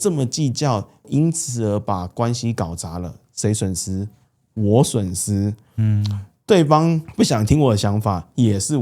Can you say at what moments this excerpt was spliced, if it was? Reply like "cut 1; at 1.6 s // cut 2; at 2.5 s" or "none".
cut 1; at 1.1 s